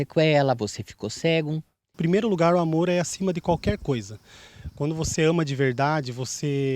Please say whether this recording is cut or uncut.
cut